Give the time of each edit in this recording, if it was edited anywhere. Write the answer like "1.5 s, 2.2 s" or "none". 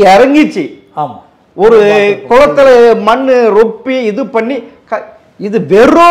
none